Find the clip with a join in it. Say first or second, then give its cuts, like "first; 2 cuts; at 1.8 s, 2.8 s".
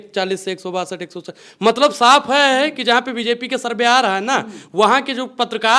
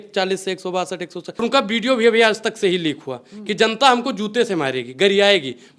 second; 1 cut; at 1.4 s